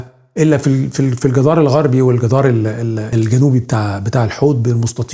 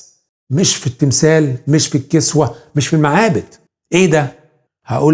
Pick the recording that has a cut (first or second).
first